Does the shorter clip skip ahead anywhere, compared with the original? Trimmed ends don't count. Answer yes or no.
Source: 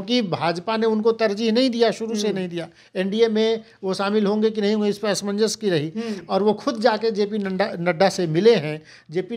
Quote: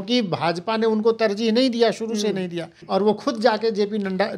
yes